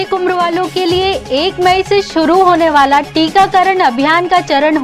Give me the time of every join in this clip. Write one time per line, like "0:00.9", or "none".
none